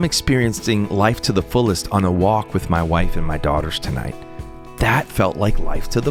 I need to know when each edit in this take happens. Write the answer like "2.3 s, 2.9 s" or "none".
none